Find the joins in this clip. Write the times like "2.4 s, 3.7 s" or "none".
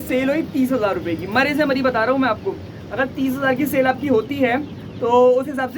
none